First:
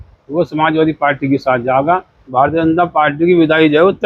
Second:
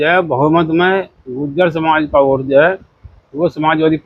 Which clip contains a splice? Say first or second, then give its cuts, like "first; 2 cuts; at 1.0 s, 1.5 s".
first; 1 cut; at 2.2 s